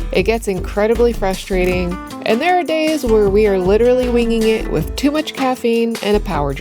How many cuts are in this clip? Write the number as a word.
one